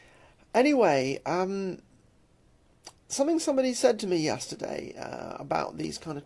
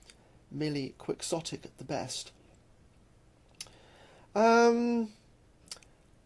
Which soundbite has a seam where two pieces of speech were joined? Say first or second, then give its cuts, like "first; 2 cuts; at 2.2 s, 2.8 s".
first; 1 cut; at 1.1 s